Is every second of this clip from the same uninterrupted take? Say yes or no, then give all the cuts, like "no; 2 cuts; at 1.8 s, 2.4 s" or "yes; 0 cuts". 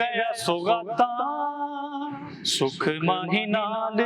yes; 0 cuts